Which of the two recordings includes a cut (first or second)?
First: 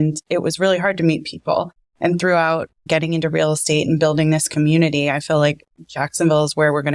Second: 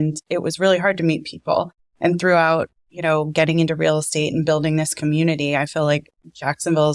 first